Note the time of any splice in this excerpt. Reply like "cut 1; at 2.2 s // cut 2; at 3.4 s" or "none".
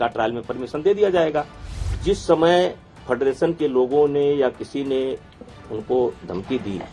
cut 1; at 1.8 s